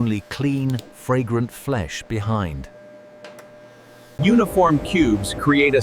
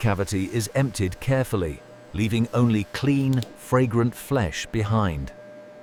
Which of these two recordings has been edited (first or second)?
first